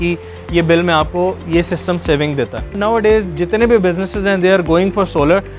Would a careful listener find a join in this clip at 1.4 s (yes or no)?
no